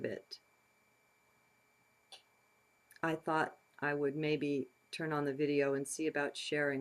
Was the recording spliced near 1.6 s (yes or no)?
no